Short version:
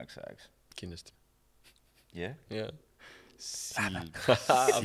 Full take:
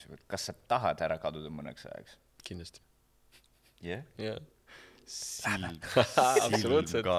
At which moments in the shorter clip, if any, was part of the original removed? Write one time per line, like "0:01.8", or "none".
none